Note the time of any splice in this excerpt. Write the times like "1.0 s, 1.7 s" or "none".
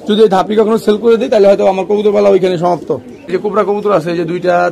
3.5 s